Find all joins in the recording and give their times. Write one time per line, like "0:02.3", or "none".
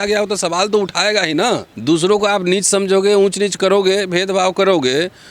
0:01.7